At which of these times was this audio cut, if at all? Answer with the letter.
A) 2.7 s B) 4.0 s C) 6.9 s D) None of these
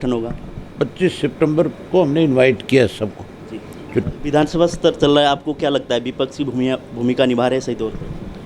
B